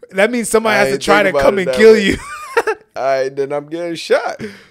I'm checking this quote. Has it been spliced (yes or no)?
no